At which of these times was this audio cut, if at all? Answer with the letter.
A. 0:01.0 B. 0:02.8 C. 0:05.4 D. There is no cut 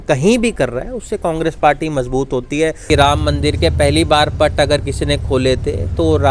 B